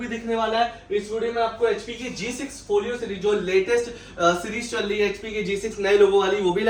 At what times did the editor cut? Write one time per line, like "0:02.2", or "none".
none